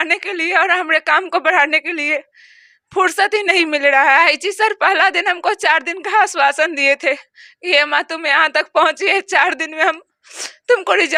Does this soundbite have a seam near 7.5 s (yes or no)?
no